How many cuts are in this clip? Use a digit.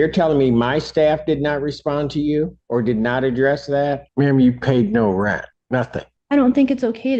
3